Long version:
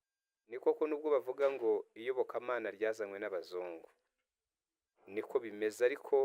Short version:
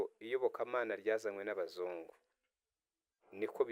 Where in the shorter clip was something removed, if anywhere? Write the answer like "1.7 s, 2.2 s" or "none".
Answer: none